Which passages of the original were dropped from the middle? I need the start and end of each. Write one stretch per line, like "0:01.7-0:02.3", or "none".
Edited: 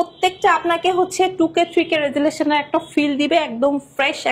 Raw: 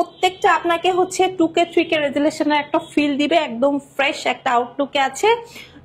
none